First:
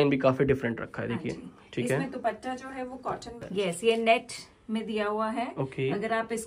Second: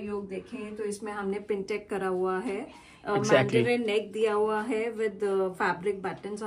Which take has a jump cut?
first; 1 cut; at 3.4 s

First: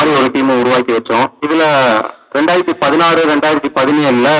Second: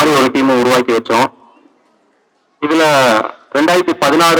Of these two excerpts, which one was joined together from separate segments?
first; 1 cut; at 1.4 s

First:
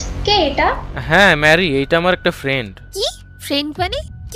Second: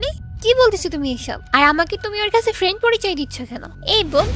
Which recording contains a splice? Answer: second; 1 cut; at 1.4 s

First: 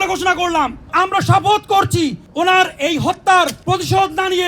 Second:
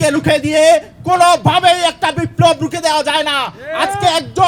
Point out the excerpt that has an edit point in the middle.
first; 3 cuts; at 0.9 s, 2.2 s, 3.6 s

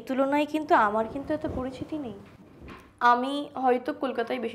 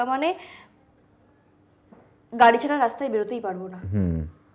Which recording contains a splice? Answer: first; 1 cut; at 2.2 s

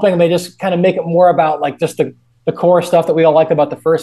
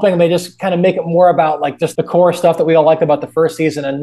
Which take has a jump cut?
second; 1 cut; at 1.8 s

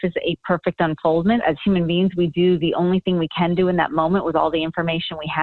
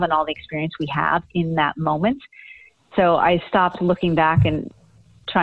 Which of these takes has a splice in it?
second; 1 cut; at 2.9 s

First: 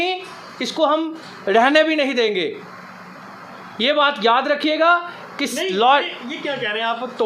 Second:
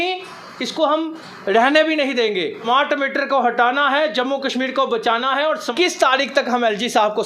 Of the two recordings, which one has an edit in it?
second; 2 cuts; at 2.6 s, 5.7 s

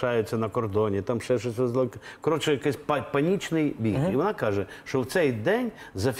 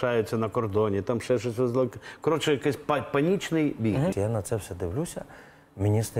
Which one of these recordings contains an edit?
second; 1 cut; at 4.1 s

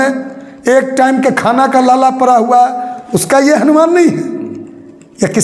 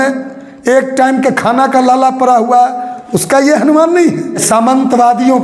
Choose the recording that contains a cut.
second; 1 cut; at 4.4 s

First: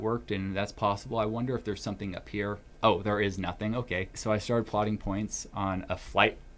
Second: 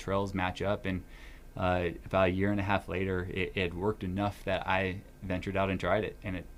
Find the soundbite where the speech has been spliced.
first; 2 cuts; at 2.6 s, 4.1 s

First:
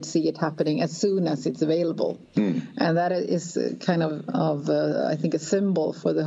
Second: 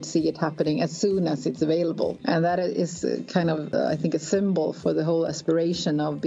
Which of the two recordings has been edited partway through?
second; 2 cuts; at 2.2 s, 3.7 s

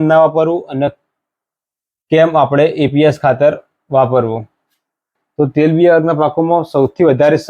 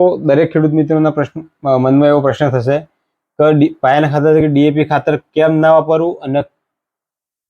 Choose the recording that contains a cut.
first; 1 cut; at 5.2 s

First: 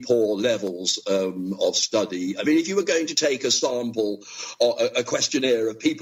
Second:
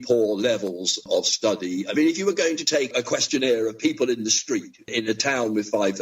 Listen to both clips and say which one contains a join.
second; 3 cuts; at 1.0 s, 2.9 s, 4.9 s

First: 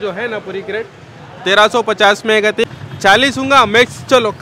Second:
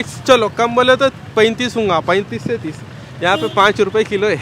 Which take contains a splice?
first; 1 cut; at 2.7 s

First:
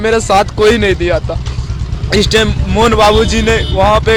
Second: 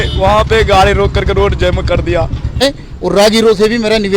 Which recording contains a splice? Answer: second; 1 cut; at 2.6 s

